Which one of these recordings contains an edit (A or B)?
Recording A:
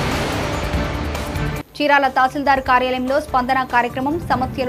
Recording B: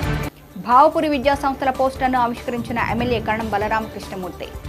A